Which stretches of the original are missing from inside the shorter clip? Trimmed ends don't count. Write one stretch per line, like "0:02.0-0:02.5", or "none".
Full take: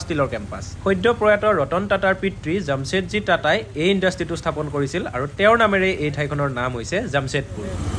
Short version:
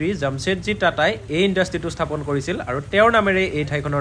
none